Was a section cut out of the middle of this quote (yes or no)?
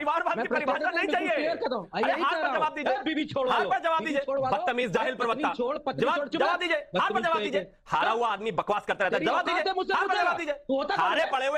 no